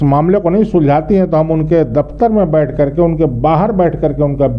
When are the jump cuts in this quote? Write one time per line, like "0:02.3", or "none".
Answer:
none